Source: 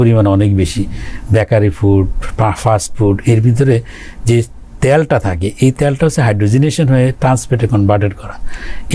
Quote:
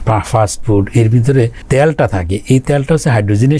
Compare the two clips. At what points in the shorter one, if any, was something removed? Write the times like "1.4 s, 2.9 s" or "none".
1.6 s